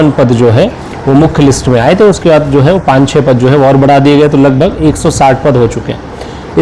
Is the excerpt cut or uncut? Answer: uncut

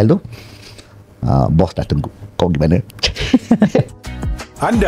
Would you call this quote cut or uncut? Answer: cut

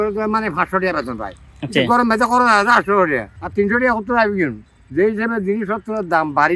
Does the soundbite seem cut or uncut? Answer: uncut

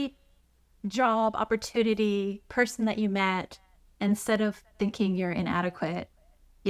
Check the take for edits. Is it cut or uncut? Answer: uncut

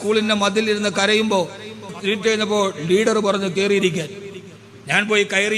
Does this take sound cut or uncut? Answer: cut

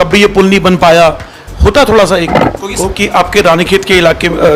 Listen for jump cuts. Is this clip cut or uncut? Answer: cut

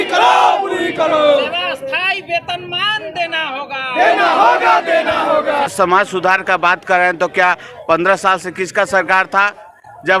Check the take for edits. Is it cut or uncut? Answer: cut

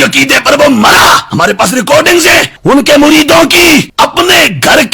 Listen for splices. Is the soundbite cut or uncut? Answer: cut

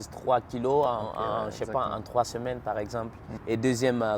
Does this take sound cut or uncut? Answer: cut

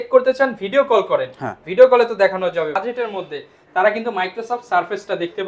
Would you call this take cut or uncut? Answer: cut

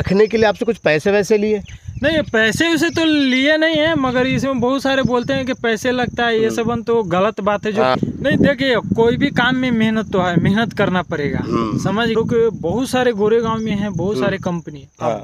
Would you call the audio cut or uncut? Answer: cut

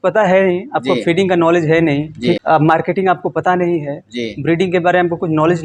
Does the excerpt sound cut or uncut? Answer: uncut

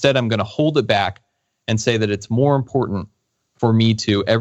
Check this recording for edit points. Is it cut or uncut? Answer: uncut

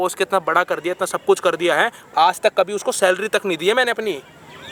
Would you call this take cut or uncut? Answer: uncut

